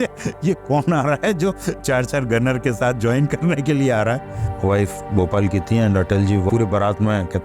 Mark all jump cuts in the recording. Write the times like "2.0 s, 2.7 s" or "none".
4.4 s, 6.5 s